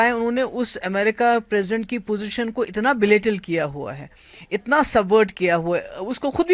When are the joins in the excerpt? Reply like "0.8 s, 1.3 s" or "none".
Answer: none